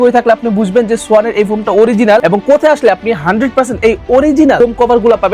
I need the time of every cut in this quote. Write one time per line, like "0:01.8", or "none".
none